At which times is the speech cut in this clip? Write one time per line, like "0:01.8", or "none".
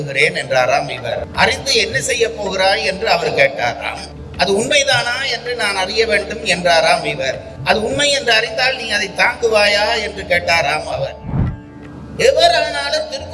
0:01.3
0:11.3

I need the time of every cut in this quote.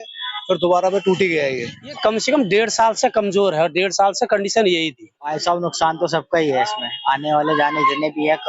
0:01.8
0:05.2

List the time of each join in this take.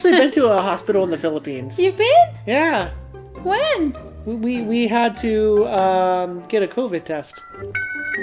none

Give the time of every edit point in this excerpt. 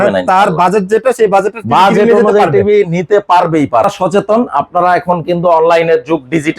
0:03.8

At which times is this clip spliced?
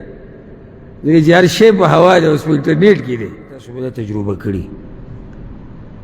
0:03.7

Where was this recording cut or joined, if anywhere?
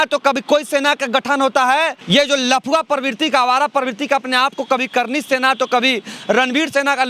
0:02.0

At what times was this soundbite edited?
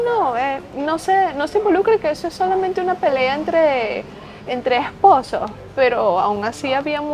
none

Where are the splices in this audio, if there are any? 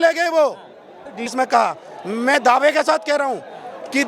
0:01.2

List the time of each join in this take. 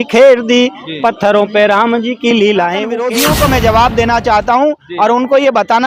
0:02.9

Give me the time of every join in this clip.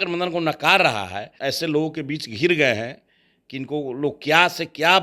0:01.3

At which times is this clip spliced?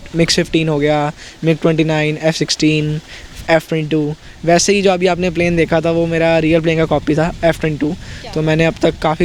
none

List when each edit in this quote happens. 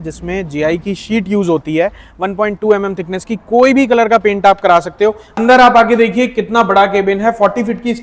0:05.3

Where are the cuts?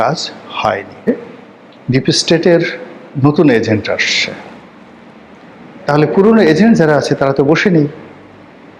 0:01.1

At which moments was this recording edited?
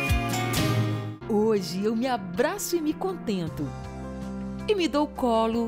0:01.0

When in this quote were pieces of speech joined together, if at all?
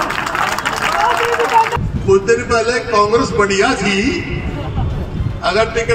0:01.7

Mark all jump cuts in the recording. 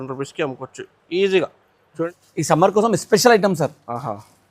0:02.0

